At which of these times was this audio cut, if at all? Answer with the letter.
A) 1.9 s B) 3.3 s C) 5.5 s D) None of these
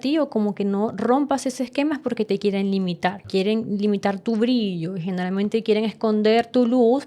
B